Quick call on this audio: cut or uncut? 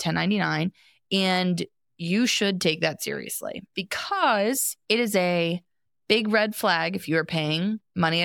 uncut